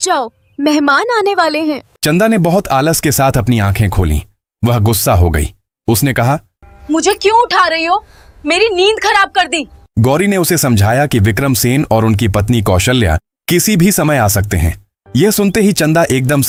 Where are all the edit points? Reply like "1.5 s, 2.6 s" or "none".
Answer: none